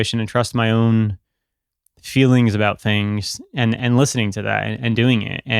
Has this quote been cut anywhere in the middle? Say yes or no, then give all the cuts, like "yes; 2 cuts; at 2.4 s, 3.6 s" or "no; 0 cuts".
no; 0 cuts